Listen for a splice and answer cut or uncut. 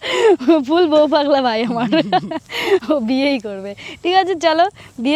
uncut